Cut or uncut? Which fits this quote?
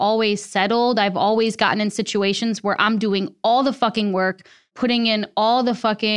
uncut